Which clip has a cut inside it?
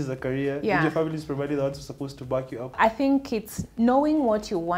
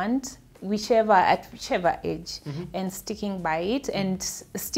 first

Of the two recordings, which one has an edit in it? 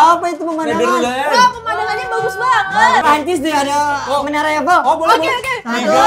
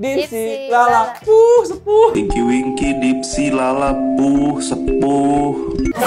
first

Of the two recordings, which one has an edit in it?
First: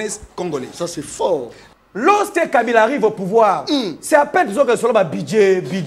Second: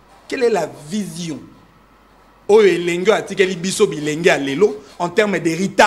first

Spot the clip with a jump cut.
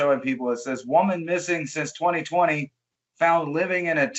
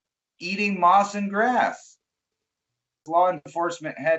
second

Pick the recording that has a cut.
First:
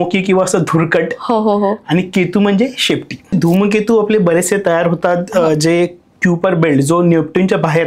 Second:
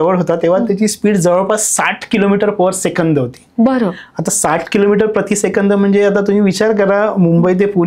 first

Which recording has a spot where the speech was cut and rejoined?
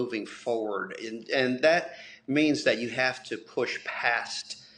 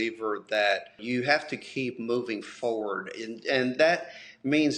second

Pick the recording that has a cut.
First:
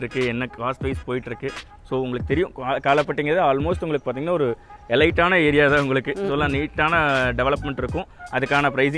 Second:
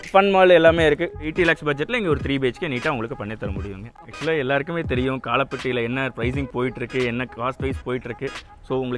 second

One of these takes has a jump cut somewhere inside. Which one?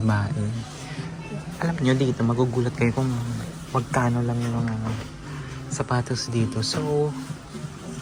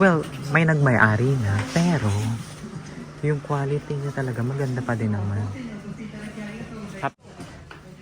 second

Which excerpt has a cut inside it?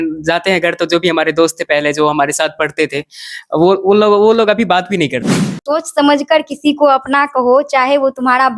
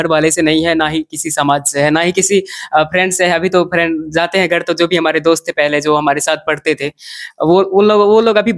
first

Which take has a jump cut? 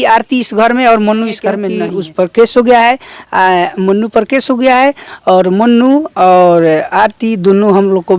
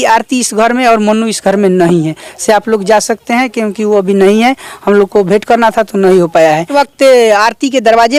first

